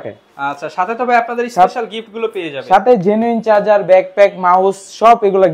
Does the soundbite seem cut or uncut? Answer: uncut